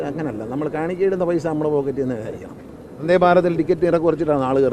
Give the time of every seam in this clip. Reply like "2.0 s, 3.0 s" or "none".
2.9 s